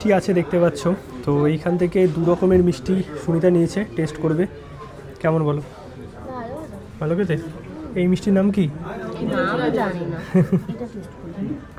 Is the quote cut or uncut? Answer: uncut